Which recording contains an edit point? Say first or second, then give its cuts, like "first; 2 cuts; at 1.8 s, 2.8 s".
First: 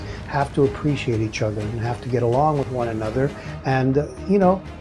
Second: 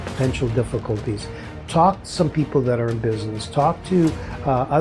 first; 1 cut; at 2.7 s